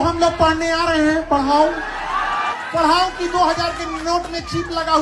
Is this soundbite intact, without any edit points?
no; 1 cut; at 2.6 s

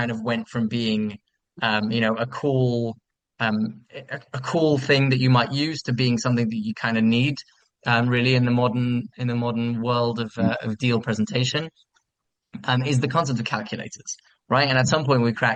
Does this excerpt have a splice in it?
no; 0 cuts

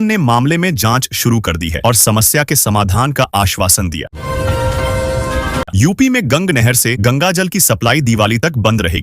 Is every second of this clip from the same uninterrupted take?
no; 2 cuts; at 4.1 s, 5.7 s

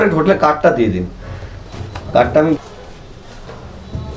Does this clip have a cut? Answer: no; 0 cuts

